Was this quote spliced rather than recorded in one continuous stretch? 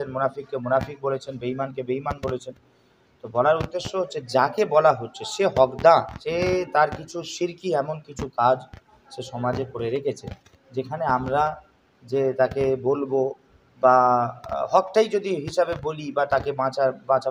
yes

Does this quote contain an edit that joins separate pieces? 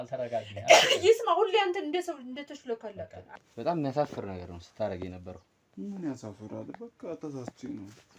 yes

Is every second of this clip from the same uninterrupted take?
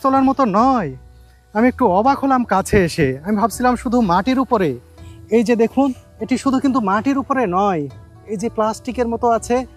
yes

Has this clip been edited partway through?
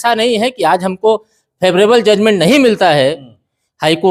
no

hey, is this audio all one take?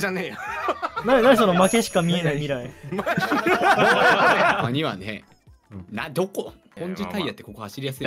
no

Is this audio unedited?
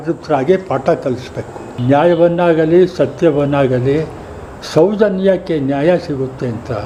yes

